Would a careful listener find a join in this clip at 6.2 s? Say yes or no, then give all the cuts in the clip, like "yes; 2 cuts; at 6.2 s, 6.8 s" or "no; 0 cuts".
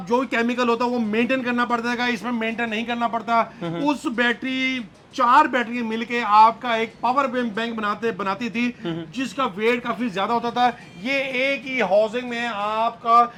no; 0 cuts